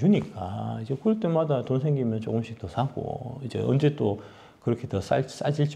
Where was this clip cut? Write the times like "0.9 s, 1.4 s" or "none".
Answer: none

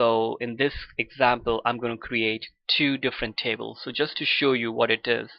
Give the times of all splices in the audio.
2.4 s

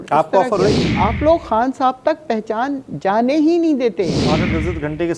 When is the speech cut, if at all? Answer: 0.9 s, 4.2 s

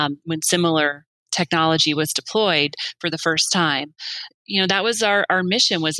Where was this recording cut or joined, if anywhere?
4.2 s

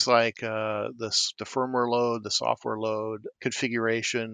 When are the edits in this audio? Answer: none

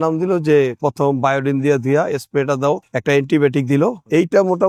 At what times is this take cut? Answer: none

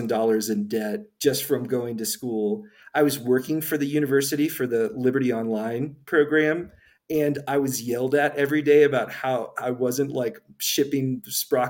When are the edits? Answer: 1.1 s

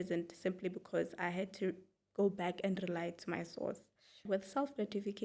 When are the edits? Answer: 4.2 s

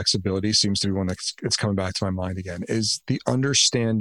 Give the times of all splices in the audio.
3.0 s

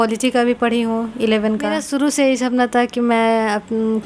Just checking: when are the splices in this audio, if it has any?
1.8 s

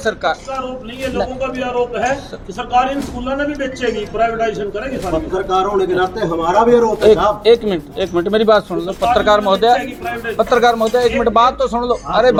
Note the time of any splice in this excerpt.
none

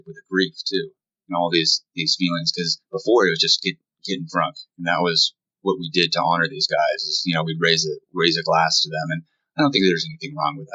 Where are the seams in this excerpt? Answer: none

